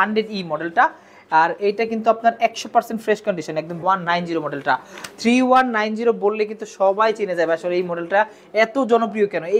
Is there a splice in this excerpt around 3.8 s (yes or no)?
yes